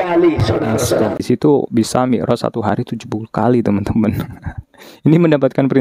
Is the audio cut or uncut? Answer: cut